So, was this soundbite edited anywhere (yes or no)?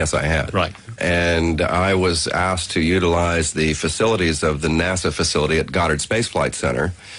no